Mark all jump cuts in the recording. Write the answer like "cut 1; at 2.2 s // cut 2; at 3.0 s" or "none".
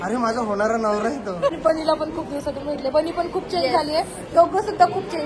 cut 1; at 1.6 s

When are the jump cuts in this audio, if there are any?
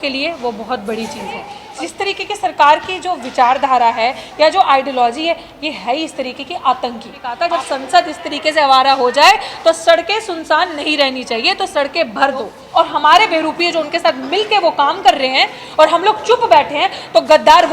cut 1; at 1.6 s // cut 2; at 7.2 s // cut 3; at 12.6 s

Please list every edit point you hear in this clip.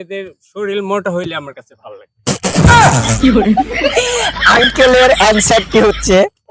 cut 1; at 2.6 s // cut 2; at 3.7 s

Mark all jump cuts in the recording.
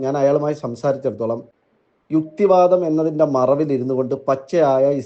cut 1; at 1.5 s

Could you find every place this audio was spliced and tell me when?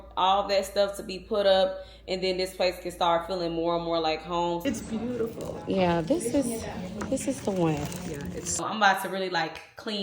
cut 1; at 4.6 s // cut 2; at 8.6 s

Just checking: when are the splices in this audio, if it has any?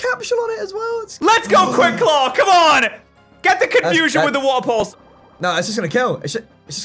cut 1; at 1.1 s

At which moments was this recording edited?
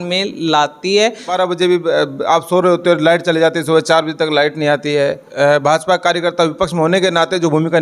cut 1; at 1.3 s // cut 2; at 5.2 s

